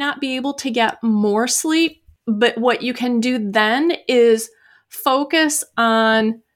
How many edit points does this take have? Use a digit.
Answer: 1